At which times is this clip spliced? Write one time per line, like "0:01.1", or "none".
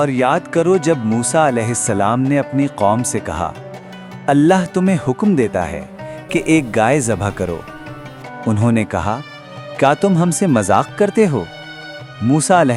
none